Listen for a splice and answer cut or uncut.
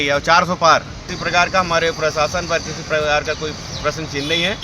cut